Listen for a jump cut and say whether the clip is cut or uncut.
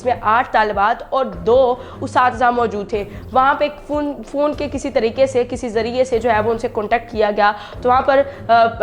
uncut